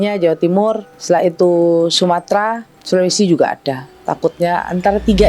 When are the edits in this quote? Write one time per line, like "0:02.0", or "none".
0:00.9
0:02.7

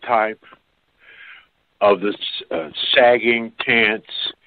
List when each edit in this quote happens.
none

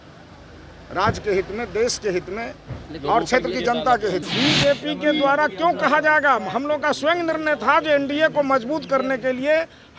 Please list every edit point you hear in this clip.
0:04.3

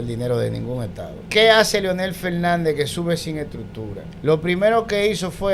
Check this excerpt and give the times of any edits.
0:01.2
0:04.1

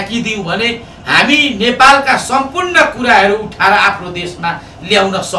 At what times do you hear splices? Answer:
none

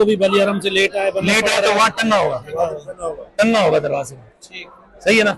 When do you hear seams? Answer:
none

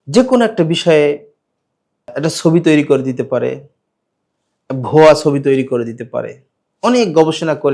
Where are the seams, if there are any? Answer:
0:02.1

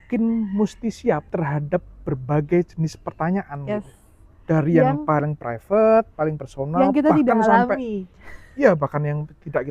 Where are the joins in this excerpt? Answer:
0:01.3

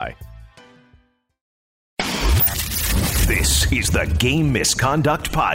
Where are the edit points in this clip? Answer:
0:01.8

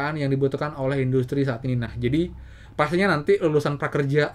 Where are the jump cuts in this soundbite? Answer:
none

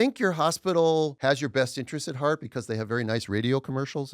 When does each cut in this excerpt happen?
0:01.1

